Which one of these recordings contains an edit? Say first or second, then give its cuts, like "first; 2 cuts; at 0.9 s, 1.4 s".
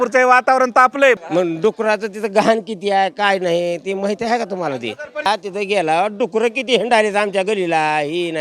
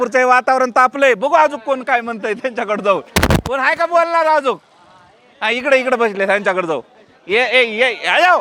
first; 2 cuts; at 1.2 s, 5.3 s